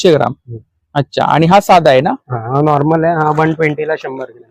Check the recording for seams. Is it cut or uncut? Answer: uncut